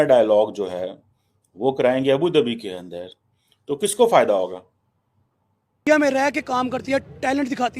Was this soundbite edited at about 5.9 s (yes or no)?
yes